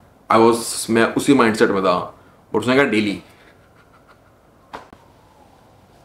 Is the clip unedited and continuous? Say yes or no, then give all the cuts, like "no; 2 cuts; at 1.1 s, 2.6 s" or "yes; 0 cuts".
yes; 0 cuts